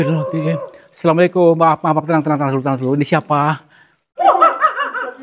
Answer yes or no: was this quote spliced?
yes